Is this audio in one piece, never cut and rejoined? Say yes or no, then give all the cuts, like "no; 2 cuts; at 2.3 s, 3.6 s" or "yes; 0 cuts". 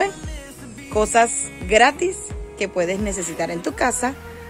yes; 0 cuts